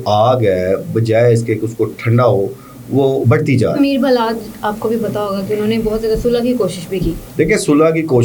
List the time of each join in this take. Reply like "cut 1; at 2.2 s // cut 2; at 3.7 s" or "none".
cut 1; at 3.7 s // cut 2; at 7.2 s